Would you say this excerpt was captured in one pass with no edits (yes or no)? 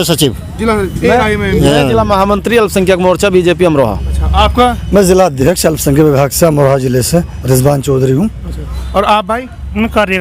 yes